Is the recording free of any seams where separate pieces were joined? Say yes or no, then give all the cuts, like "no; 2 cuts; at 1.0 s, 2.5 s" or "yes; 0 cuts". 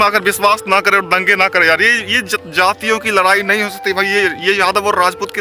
yes; 0 cuts